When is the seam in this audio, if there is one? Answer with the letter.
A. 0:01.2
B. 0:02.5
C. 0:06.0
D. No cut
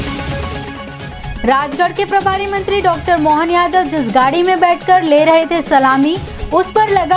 A